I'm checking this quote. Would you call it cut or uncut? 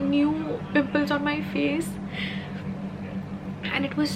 uncut